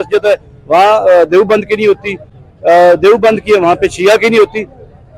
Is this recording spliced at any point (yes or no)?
no